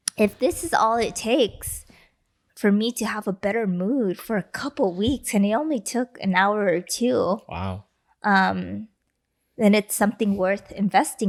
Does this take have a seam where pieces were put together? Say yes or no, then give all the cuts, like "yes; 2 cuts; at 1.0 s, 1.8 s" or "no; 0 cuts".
no; 0 cuts